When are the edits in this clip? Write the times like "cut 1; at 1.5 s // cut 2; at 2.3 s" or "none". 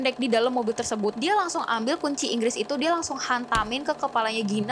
cut 1; at 1.1 s

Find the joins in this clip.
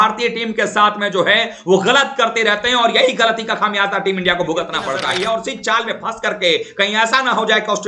cut 1; at 5.0 s

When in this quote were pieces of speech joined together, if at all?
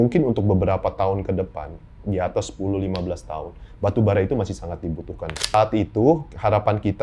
cut 1; at 5.5 s

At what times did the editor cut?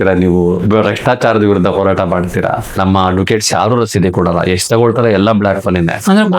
cut 1; at 2.7 s

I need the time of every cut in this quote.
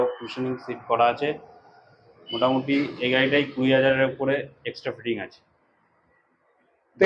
none

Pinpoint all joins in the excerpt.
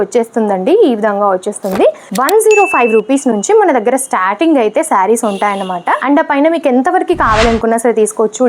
cut 1; at 2.1 s

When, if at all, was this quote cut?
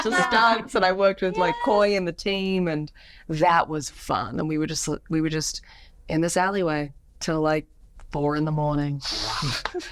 none

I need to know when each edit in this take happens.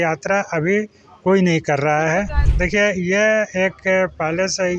cut 1; at 2.4 s

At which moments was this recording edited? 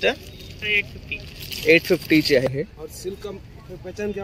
cut 1; at 2.5 s

